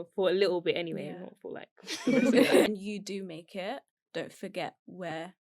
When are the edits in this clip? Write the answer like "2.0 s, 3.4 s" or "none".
2.7 s